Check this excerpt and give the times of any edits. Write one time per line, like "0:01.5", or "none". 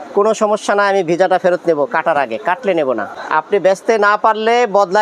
0:03.1